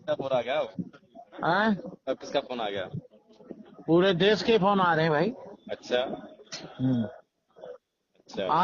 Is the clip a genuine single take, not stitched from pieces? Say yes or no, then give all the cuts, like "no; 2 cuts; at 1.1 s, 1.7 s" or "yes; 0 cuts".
yes; 0 cuts